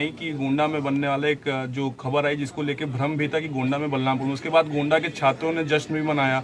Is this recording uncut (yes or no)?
yes